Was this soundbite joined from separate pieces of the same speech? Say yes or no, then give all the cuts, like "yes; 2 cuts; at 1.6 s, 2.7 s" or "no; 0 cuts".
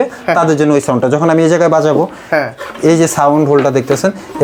no; 0 cuts